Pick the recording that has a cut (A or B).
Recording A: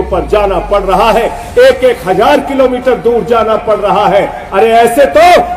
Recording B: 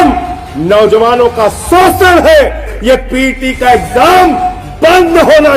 B